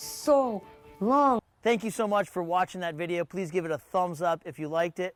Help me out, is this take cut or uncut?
uncut